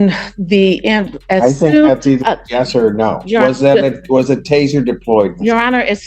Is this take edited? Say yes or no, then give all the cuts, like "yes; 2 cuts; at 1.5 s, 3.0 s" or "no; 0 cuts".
no; 0 cuts